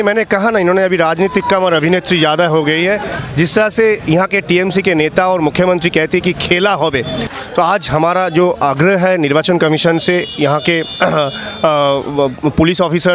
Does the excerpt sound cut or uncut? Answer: cut